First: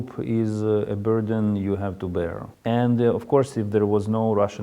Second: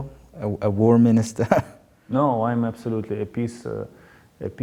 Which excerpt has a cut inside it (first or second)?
first